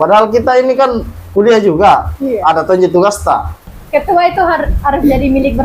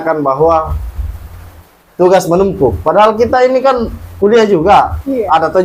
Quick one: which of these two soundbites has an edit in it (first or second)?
first